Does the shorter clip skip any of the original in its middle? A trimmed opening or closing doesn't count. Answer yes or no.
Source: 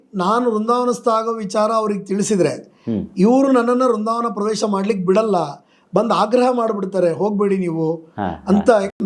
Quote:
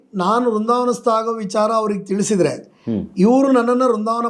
no